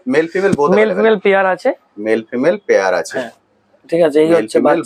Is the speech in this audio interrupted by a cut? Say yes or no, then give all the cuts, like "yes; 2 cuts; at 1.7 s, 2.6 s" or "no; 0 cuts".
no; 0 cuts